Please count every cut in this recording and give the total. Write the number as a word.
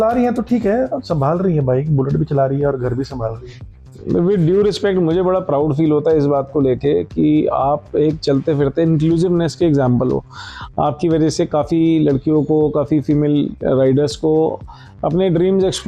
zero